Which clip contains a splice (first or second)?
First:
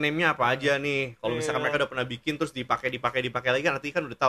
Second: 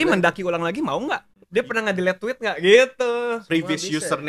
second